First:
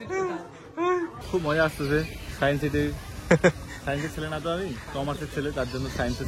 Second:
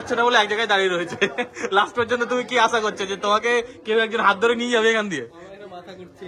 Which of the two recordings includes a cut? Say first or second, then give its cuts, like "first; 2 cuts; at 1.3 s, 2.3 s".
first; 1 cut; at 1.2 s